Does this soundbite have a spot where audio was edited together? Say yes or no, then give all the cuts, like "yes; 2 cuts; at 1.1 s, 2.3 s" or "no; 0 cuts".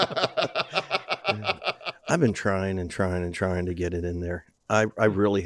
yes; 1 cut; at 1.9 s